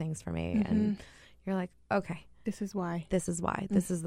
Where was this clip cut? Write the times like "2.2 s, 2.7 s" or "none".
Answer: none